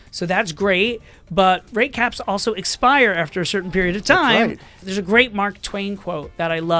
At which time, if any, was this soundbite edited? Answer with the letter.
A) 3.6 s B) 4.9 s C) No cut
B